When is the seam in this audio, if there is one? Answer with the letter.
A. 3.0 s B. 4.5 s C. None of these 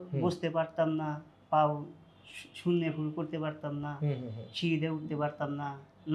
C